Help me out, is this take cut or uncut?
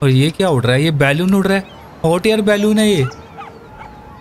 uncut